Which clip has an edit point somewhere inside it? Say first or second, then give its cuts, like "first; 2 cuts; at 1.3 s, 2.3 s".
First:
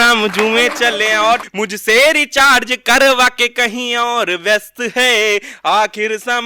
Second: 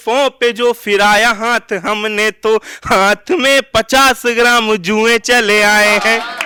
first; 1 cut; at 1.5 s